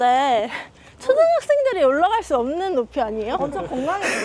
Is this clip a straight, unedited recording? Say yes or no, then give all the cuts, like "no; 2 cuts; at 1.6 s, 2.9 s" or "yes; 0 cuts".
yes; 0 cuts